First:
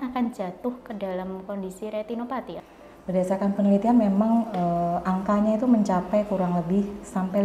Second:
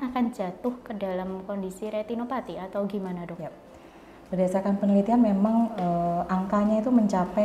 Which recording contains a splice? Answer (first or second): first